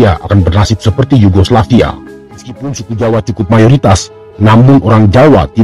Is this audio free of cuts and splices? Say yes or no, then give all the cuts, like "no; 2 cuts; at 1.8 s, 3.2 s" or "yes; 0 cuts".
no; 1 cut; at 2.8 s